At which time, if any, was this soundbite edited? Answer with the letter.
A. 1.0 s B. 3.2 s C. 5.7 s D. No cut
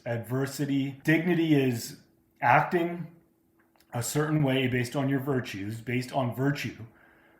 A